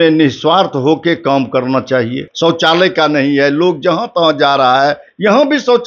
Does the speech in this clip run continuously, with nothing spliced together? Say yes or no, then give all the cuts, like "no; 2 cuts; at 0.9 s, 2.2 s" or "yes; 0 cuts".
no; 1 cut; at 2.3 s